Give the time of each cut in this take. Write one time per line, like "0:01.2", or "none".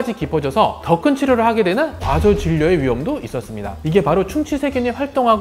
0:03.8

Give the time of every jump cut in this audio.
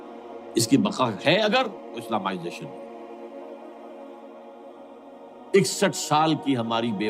none

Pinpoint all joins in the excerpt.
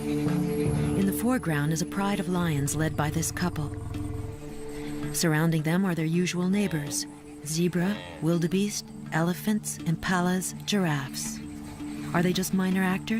0:07.9

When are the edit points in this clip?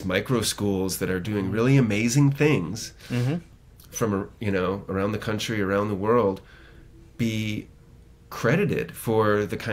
0:03.5

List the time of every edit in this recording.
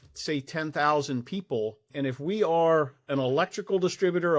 0:01.8

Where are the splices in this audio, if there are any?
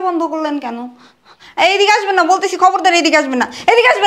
none

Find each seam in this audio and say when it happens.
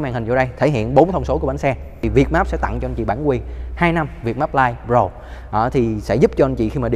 0:02.0

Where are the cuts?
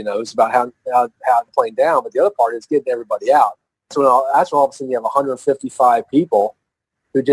0:01.5
0:03.9

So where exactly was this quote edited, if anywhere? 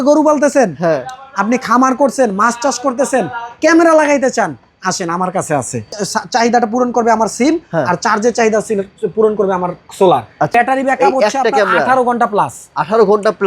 0:06.0
0:10.5

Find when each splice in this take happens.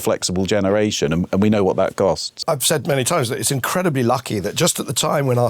0:02.4

